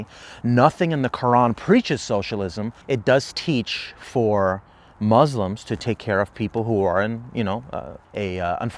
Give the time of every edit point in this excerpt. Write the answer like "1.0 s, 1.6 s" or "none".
none